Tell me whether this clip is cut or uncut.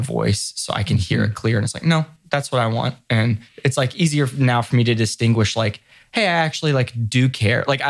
cut